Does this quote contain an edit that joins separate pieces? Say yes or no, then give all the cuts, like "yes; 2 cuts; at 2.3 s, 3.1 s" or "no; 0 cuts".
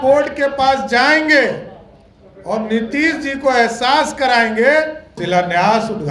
yes; 1 cut; at 5.2 s